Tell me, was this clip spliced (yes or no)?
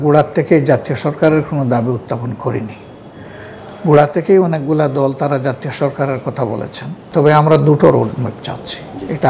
yes